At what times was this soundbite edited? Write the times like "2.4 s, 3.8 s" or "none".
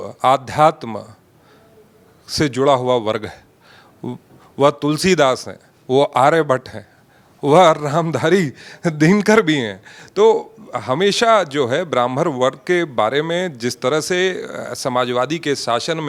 none